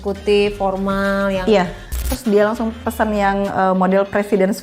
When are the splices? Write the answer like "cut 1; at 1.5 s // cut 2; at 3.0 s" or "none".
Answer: cut 1; at 2.1 s